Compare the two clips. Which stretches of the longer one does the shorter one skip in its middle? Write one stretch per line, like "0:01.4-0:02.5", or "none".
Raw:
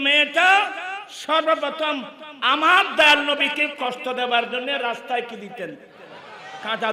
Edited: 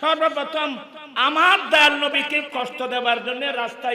none